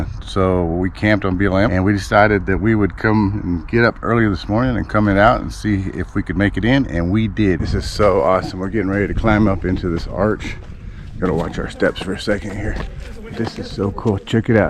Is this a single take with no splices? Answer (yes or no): no